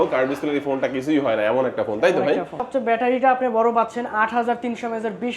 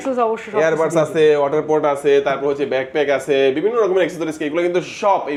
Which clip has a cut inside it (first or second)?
first